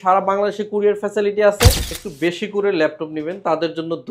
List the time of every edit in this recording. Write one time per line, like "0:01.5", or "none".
0:01.9